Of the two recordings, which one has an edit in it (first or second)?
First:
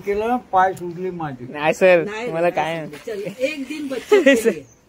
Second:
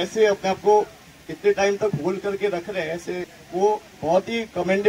second